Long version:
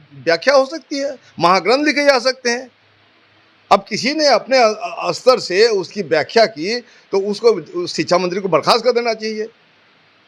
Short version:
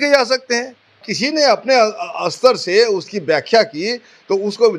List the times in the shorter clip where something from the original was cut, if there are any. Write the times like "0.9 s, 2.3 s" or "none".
1.1 s